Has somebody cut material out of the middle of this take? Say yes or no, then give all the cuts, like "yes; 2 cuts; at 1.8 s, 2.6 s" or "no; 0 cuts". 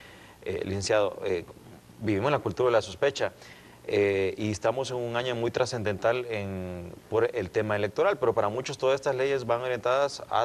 no; 0 cuts